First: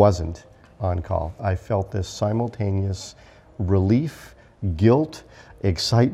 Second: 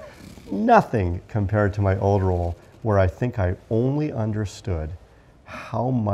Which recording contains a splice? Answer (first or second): first